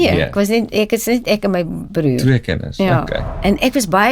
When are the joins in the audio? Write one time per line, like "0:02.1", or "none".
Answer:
0:03.2